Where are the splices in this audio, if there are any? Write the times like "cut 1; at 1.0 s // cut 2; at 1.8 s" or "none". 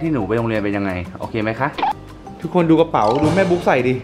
cut 1; at 2.1 s